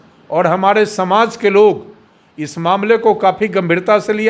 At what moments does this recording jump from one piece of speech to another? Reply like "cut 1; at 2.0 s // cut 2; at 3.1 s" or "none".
none